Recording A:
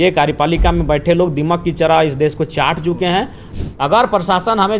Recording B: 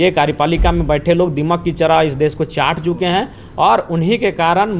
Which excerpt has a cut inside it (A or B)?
A